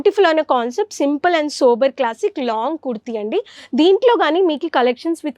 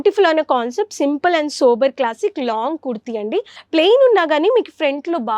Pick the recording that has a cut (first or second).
second